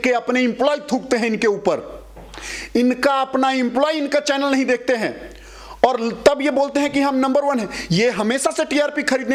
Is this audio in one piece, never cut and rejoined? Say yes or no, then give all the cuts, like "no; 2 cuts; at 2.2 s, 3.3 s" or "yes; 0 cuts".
yes; 0 cuts